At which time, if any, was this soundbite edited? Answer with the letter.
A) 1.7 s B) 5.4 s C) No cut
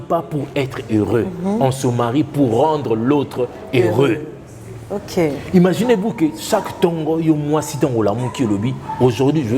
C